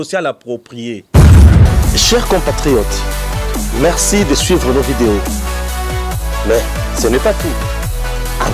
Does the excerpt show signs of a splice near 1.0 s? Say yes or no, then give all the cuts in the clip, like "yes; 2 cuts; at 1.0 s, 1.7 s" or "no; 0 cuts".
yes; 2 cuts; at 1.0 s, 1.8 s